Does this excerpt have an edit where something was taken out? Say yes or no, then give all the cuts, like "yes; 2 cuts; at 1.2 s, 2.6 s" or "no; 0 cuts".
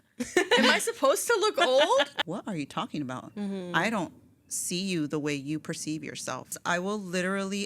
yes; 2 cuts; at 2.1 s, 6.5 s